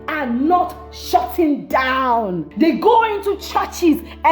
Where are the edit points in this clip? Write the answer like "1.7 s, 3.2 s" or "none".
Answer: 2.5 s